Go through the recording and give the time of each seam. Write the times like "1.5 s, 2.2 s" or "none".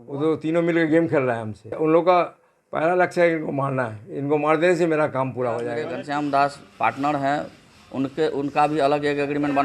1.8 s, 5.9 s